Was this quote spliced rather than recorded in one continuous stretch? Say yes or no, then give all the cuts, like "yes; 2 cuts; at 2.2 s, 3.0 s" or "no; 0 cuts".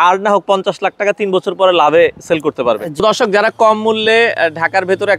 yes; 1 cut; at 3.0 s